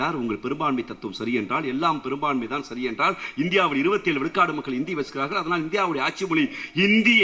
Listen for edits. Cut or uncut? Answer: uncut